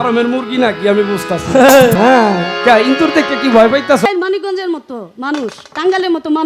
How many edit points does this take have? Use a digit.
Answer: 2